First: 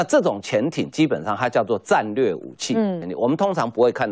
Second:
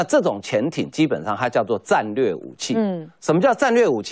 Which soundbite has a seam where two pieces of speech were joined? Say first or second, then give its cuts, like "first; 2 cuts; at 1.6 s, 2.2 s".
first; 1 cut; at 3.1 s